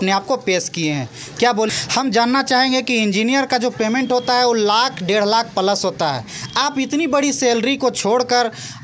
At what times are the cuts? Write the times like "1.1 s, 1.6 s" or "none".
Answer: 1.7 s